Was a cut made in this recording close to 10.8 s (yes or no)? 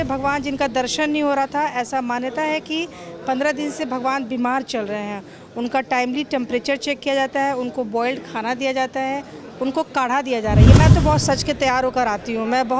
yes